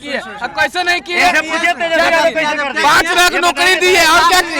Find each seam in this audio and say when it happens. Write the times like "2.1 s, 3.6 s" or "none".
none